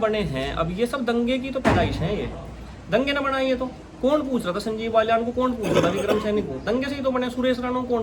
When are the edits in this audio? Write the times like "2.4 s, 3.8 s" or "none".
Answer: none